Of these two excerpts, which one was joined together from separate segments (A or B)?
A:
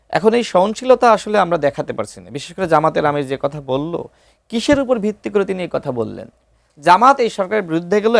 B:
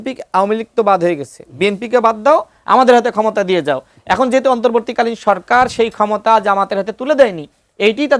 A